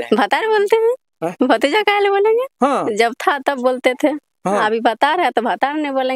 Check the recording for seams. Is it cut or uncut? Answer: uncut